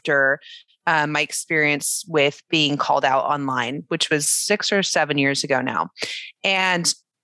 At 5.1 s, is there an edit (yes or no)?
no